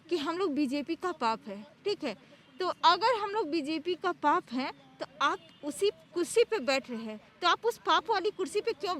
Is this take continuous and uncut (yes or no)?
yes